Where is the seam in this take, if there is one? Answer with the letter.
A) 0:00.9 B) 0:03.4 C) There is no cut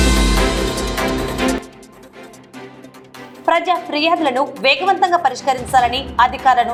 C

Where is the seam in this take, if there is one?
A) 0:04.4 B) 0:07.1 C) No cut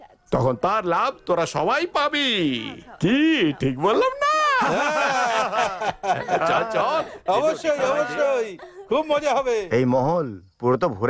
C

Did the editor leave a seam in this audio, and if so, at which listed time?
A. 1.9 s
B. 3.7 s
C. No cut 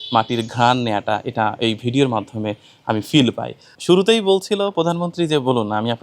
B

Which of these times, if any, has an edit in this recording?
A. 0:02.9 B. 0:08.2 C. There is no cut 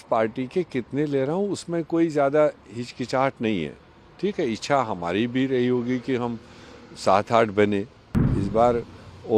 B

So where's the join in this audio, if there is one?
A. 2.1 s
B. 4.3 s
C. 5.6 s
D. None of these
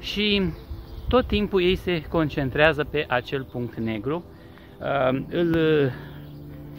D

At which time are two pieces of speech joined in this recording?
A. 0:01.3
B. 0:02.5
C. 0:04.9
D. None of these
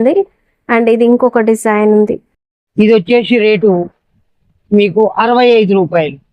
B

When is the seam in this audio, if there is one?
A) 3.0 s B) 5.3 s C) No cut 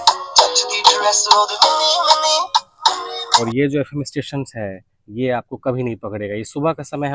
A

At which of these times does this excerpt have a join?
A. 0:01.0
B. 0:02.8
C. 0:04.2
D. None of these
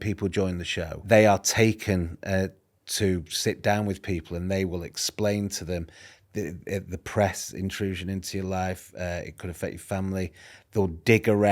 A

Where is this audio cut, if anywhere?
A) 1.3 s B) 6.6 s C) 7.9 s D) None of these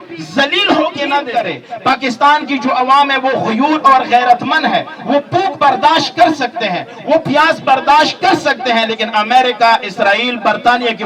A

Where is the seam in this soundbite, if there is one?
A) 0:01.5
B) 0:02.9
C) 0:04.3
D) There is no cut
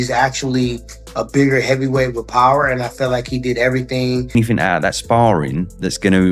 C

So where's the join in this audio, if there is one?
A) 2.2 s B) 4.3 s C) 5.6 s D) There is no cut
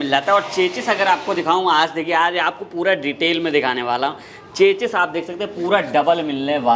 D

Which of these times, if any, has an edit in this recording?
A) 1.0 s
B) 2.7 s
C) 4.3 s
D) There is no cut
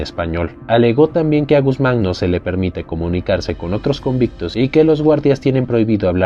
D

